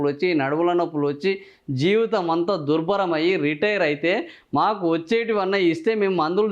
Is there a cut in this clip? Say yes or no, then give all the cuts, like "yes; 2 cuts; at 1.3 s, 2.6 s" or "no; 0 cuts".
no; 0 cuts